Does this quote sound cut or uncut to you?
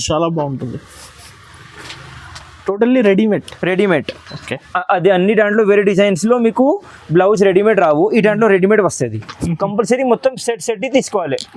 cut